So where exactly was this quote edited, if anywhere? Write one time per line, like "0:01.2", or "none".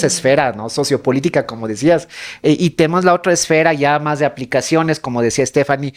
none